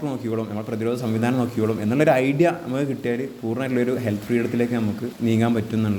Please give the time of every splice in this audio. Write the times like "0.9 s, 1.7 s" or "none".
5.1 s